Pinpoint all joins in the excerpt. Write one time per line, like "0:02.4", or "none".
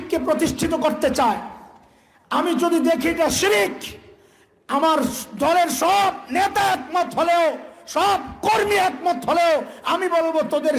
none